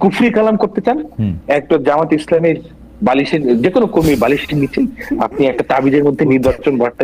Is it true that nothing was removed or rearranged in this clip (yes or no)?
yes